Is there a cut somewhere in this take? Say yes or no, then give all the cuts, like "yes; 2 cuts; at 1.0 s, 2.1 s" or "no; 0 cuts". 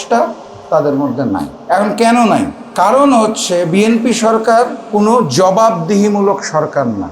yes; 3 cuts; at 1.5 s, 2.6 s, 4.8 s